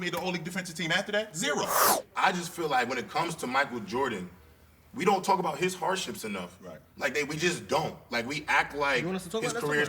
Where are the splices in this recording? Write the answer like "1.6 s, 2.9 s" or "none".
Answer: 1.9 s